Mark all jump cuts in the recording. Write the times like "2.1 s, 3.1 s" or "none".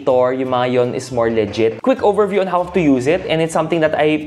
1.8 s